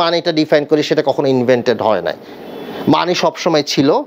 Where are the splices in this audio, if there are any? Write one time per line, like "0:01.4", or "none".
none